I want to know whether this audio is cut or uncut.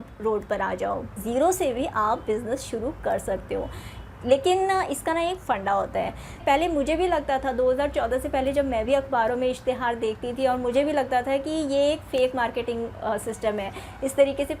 cut